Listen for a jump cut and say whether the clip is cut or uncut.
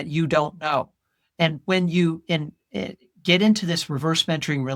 uncut